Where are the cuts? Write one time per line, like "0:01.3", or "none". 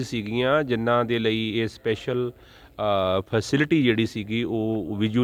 none